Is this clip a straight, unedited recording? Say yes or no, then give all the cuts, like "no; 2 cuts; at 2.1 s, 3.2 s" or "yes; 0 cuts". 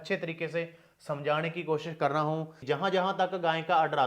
no; 1 cut; at 2.6 s